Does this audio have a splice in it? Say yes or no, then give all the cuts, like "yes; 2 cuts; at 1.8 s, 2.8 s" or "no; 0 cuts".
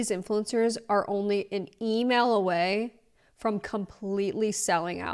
no; 0 cuts